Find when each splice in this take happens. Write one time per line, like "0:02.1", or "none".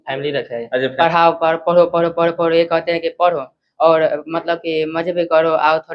0:00.9

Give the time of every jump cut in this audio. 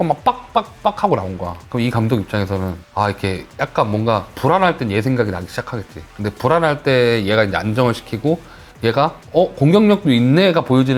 none

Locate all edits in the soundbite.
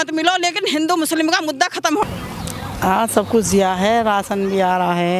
0:02.0

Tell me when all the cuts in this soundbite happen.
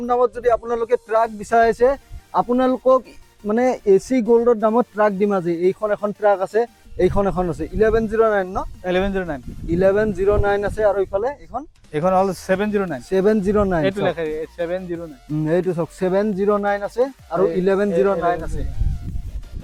none

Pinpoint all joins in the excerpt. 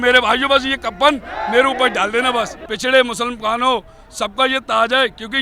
0:02.6

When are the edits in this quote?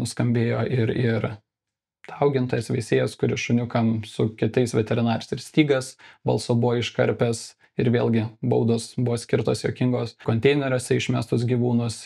0:10.2

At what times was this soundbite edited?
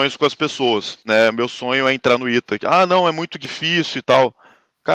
0:00.9

